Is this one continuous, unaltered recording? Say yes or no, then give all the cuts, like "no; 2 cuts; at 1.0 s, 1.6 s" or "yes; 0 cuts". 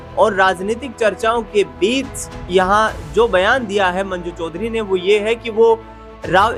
yes; 0 cuts